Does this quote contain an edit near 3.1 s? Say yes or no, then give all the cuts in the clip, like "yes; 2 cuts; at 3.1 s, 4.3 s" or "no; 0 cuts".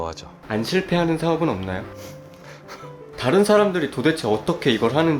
yes; 1 cut; at 3.1 s